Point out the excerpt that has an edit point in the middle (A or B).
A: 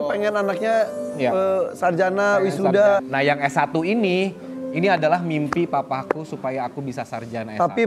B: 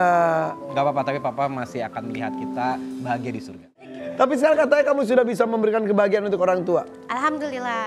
B